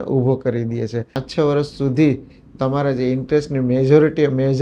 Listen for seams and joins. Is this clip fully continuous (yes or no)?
no